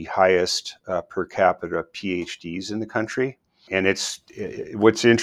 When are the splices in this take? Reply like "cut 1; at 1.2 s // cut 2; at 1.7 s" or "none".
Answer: cut 1; at 3.6 s

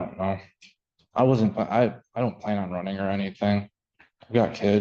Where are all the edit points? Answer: none

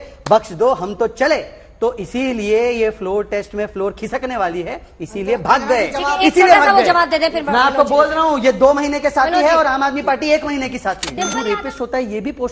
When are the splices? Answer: cut 1; at 11.3 s

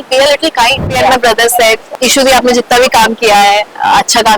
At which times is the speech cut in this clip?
cut 1; at 0.9 s // cut 2; at 1.9 s

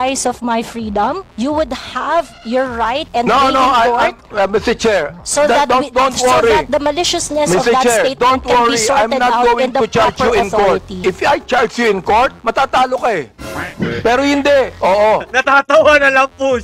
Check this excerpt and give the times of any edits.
cut 1; at 11.0 s

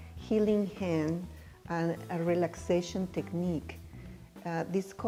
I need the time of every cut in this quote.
none

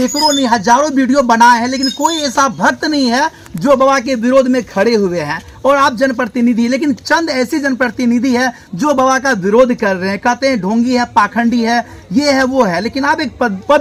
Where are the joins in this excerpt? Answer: none

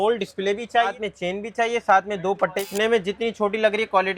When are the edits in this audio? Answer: cut 1; at 0.9 s // cut 2; at 2.7 s

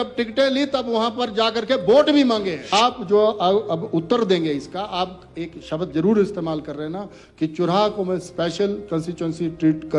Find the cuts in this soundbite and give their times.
cut 1; at 2.6 s

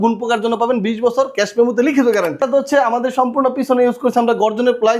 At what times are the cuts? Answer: cut 1; at 2.4 s

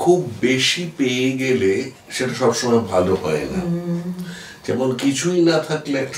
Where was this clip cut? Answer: none

